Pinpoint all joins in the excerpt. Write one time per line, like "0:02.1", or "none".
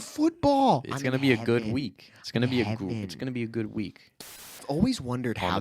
0:04.3